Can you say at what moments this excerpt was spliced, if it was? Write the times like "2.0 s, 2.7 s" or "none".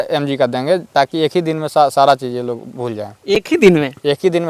none